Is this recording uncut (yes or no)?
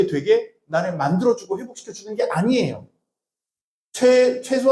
yes